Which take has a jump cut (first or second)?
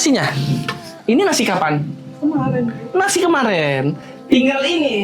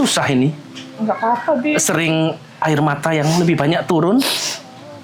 first